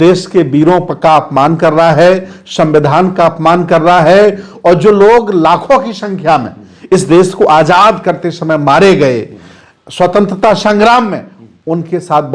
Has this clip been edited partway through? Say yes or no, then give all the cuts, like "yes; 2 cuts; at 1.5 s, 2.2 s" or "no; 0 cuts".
no; 0 cuts